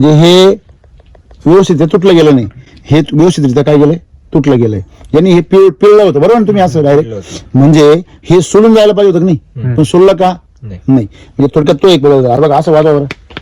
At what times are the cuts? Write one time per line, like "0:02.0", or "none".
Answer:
0:12.4